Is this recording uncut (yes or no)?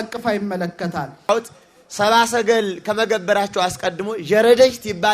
no